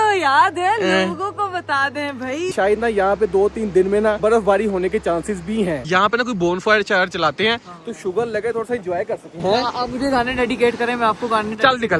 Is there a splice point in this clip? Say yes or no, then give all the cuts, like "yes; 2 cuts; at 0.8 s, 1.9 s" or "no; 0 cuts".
yes; 2 cuts; at 2.5 s, 5.8 s